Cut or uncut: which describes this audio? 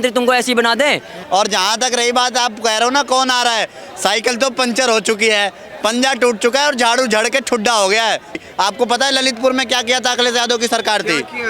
cut